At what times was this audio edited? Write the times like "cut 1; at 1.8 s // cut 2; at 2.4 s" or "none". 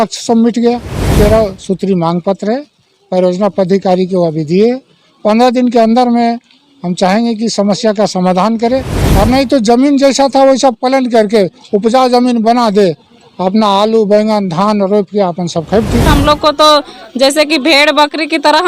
cut 1; at 1.1 s // cut 2; at 9.0 s // cut 3; at 16.1 s